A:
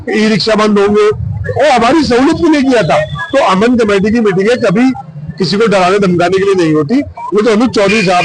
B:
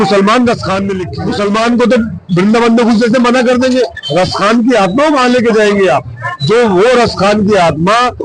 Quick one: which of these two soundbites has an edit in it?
B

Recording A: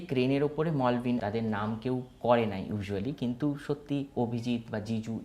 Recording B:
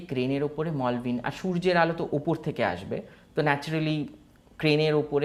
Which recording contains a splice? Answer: A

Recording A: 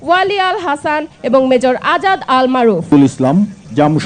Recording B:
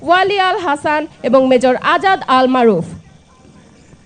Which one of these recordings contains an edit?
A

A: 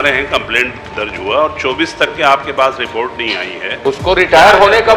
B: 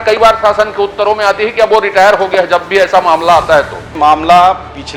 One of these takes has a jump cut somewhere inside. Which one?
B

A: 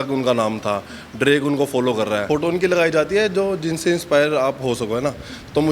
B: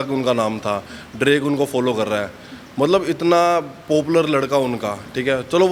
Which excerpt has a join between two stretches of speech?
A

